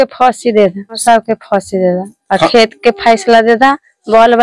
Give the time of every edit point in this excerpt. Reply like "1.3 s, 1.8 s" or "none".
1.0 s